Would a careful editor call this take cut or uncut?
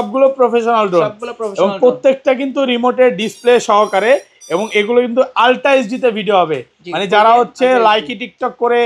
uncut